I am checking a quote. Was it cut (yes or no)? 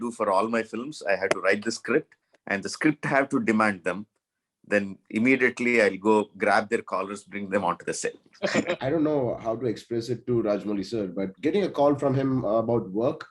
yes